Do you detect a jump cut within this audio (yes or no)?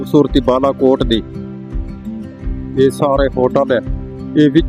no